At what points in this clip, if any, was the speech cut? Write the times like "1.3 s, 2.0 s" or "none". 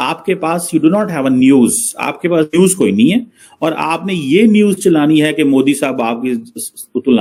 none